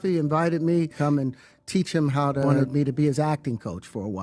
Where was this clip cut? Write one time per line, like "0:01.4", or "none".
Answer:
0:00.9
0:02.5